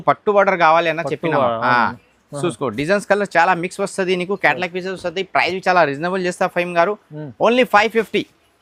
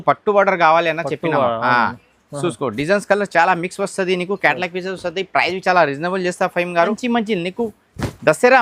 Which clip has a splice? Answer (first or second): second